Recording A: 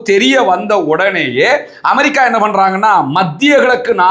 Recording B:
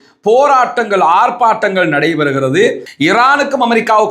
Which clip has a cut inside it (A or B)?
B